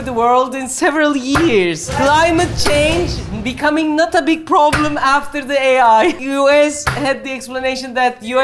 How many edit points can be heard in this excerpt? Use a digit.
1